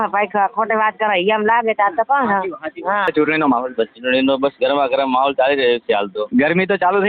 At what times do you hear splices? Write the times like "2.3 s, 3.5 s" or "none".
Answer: 3.1 s